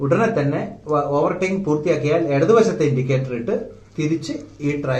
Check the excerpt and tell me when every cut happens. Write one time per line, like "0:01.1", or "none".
none